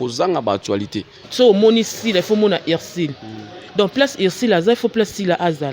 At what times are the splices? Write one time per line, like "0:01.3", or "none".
0:01.2